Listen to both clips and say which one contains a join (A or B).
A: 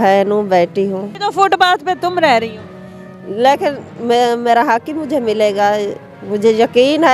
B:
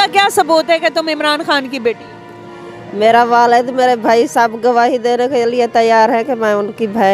A